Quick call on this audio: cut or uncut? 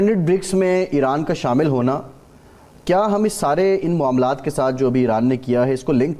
uncut